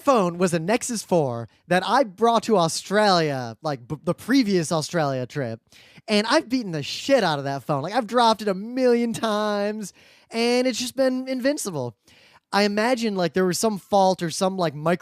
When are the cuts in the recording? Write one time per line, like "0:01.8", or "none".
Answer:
0:06.9